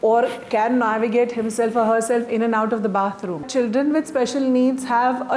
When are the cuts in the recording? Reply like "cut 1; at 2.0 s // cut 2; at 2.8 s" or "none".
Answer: cut 1; at 3.5 s